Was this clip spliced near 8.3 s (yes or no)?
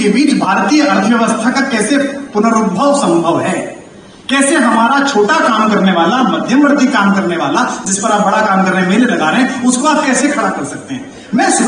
no